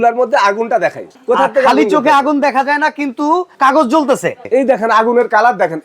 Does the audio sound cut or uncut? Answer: cut